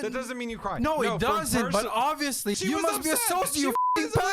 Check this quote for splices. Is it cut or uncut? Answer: cut